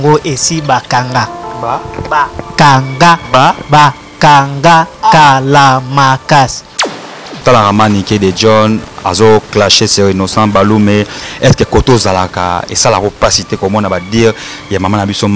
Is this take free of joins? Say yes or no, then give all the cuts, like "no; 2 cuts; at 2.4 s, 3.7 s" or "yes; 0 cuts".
no; 1 cut; at 6.8 s